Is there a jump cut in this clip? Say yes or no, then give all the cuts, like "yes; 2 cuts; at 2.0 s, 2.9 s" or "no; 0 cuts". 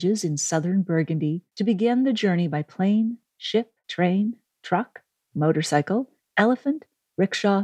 yes; 2 cuts; at 1.5 s, 3.8 s